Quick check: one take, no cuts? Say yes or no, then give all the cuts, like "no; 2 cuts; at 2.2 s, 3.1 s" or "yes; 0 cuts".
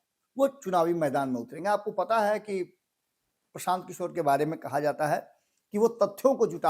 yes; 0 cuts